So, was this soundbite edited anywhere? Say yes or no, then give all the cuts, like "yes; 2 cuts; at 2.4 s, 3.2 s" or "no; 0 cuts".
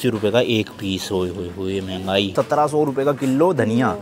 yes; 1 cut; at 2.3 s